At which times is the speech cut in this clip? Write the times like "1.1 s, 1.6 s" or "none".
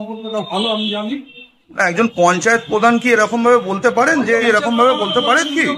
4.4 s